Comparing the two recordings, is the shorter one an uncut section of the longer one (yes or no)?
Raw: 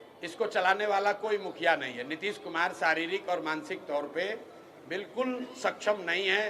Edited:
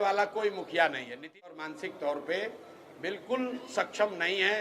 no